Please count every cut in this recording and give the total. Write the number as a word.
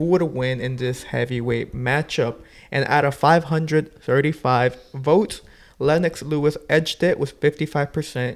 zero